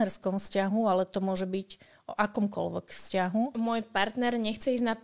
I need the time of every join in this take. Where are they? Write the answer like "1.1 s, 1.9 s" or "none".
3.5 s

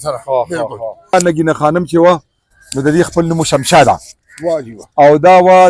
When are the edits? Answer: 1.1 s

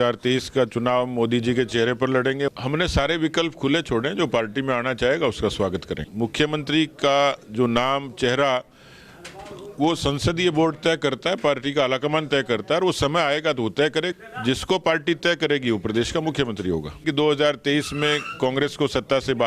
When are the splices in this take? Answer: 2.5 s, 6.0 s, 14.1 s, 17.0 s

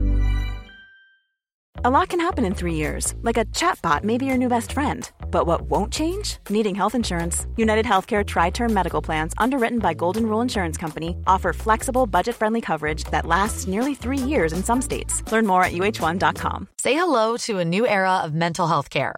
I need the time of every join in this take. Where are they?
1.6 s, 16.7 s

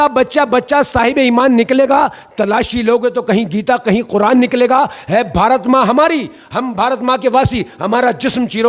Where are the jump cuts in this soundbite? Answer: none

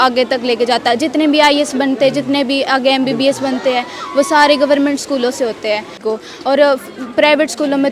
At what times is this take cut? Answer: 6.0 s

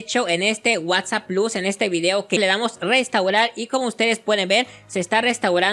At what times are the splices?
2.4 s

